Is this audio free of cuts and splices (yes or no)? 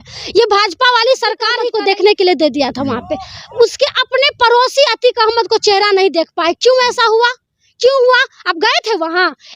no